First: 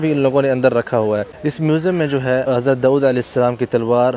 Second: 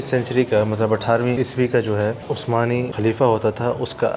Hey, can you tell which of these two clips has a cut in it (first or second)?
first